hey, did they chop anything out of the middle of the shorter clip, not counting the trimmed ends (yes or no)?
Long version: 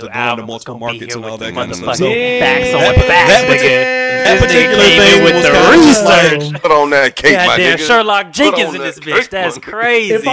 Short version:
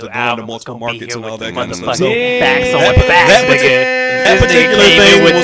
no